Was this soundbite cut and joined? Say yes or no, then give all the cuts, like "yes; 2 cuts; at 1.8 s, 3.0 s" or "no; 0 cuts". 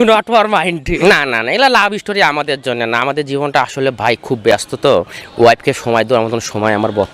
yes; 1 cut; at 1.0 s